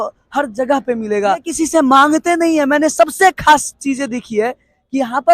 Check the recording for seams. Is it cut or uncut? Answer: cut